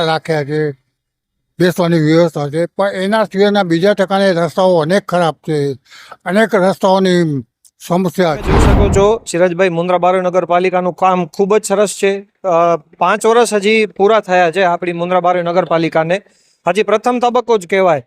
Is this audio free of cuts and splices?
no; 1 cut; at 8.7 s

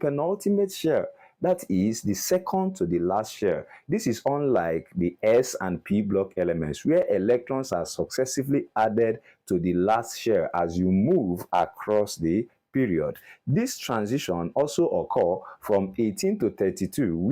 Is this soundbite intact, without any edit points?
yes; 0 cuts

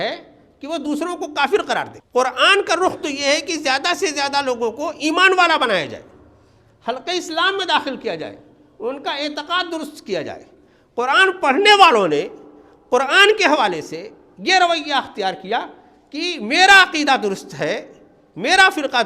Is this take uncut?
no; 1 cut; at 2.0 s

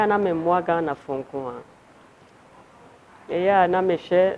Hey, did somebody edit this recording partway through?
no; 0 cuts

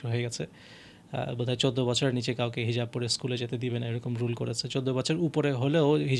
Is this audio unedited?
yes; 0 cuts

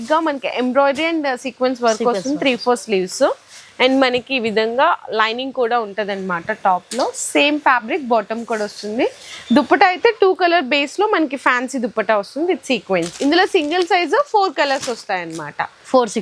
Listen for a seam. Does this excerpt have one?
no; 0 cuts

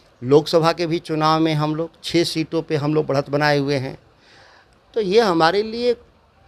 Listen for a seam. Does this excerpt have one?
no; 0 cuts

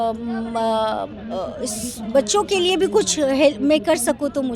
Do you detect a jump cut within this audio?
no; 0 cuts

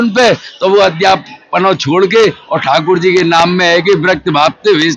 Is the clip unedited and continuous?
yes; 0 cuts

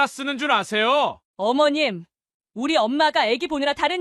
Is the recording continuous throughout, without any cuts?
no; 1 cut; at 1.2 s

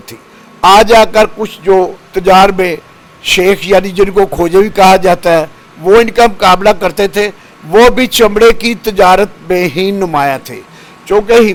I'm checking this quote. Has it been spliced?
no; 0 cuts

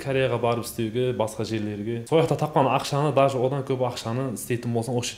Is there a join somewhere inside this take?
yes; 1 cut; at 2.0 s

